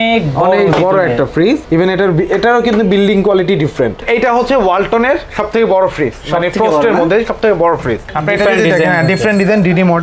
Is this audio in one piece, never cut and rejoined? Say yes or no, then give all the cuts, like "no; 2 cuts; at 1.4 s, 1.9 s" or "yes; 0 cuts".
no; 2 cuts; at 4.0 s, 8.1 s